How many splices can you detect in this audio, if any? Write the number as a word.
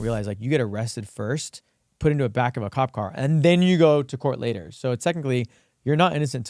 zero